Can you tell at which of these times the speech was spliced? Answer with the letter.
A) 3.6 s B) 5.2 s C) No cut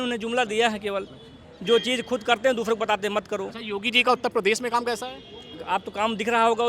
C